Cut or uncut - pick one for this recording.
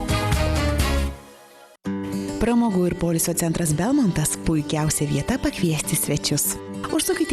cut